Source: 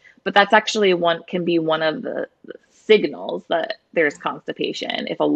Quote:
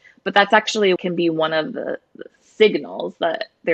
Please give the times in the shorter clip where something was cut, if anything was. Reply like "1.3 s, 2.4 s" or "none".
1.0 s